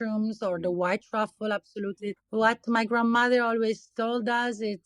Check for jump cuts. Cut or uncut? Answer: cut